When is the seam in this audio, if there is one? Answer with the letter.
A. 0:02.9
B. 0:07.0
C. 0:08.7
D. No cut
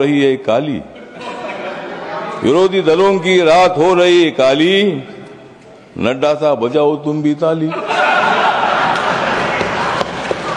D